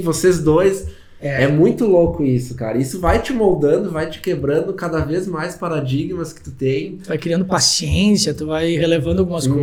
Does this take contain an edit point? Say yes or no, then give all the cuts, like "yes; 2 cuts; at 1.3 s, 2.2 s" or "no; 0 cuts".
no; 0 cuts